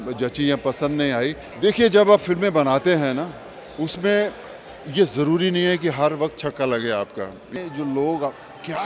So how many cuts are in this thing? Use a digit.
2